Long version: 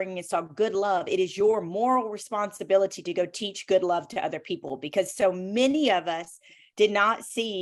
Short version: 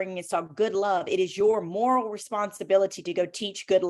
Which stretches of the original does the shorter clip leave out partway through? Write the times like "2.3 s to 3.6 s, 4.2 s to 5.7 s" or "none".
none